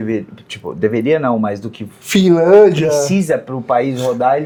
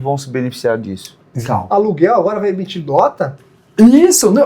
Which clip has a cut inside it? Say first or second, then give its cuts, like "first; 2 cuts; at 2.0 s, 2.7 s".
second; 1 cut; at 1.3 s